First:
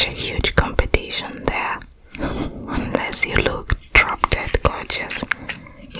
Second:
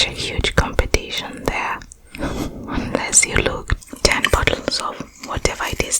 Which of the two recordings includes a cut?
second; 1 cut; at 3.8 s

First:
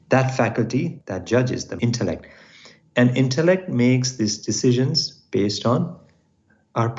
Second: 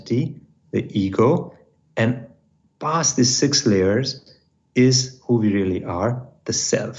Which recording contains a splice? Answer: first; 2 cuts; at 1.0 s, 1.7 s

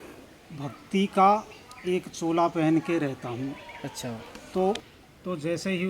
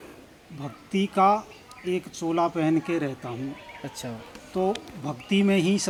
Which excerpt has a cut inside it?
first; 1 cut; at 4.9 s

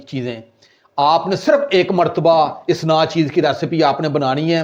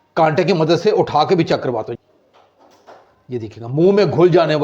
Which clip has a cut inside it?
second; 1 cut; at 2.0 s

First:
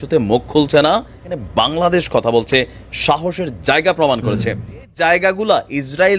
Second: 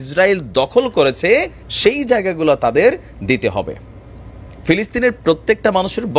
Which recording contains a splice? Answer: first; 2 cuts; at 1.3 s, 4.9 s

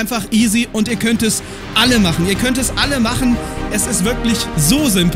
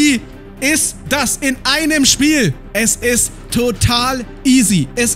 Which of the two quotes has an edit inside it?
second; 1 cut; at 2.6 s

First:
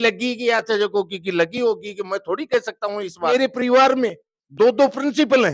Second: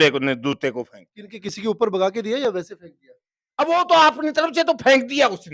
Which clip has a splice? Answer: first; 1 cut; at 3.3 s

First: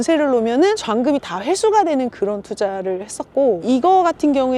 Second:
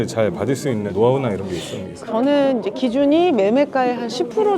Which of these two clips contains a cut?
second; 1 cut; at 2.0 s

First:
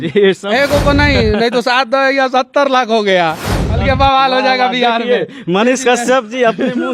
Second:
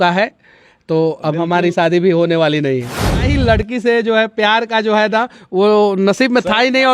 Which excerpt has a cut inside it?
second; 1 cut; at 3.2 s

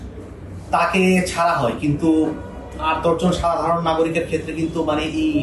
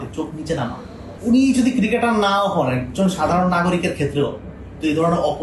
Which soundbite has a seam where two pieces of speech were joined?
second; 1 cut; at 1.1 s

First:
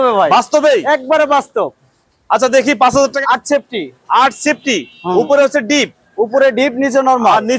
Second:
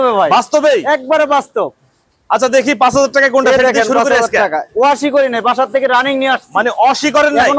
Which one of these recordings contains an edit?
first; 1 cut; at 3.2 s

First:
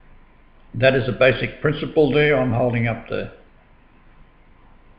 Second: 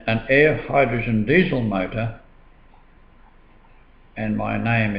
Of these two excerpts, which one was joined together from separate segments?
first; 1 cut; at 1.5 s

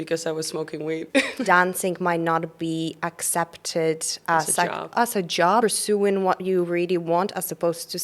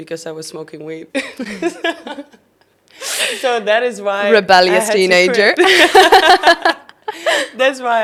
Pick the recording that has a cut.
first; 2 cuts; at 1.3 s, 5.6 s

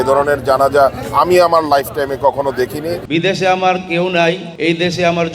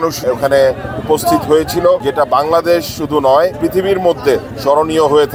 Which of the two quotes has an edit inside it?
first; 1 cut; at 3.0 s

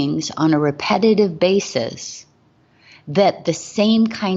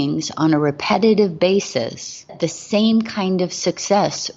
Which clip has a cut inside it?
second; 1 cut; at 2.3 s

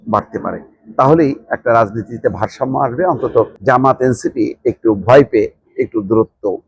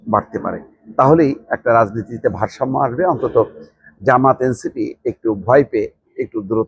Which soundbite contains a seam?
first; 1 cut; at 3.5 s

